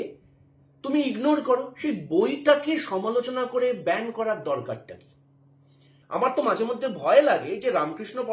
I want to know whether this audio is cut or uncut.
cut